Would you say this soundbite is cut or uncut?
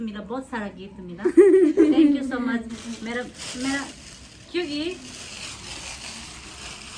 uncut